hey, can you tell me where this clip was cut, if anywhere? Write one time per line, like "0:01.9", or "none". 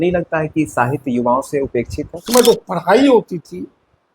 0:02.2